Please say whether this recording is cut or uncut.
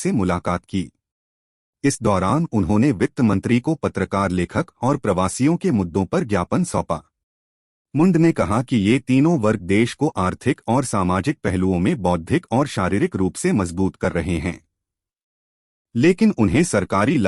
uncut